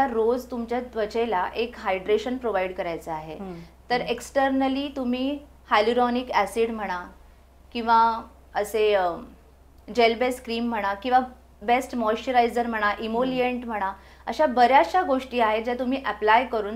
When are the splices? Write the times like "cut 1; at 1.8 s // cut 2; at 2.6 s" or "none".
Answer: none